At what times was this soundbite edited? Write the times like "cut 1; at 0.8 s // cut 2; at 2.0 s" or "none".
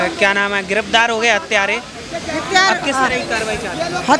none